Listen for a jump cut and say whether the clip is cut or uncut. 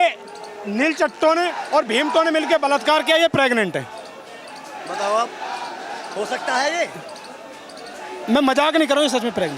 uncut